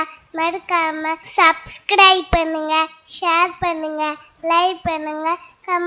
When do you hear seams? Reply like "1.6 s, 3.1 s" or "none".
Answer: 1.2 s